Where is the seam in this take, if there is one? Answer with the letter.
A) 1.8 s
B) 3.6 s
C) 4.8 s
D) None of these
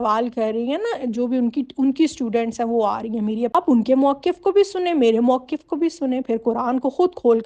B